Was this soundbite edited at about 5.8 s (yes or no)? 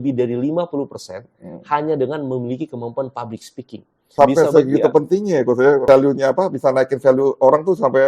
yes